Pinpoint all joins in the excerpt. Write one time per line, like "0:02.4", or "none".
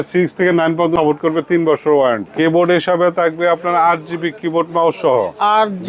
0:00.9
0:02.3